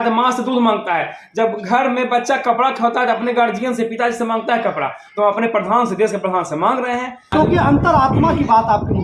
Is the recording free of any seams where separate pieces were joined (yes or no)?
no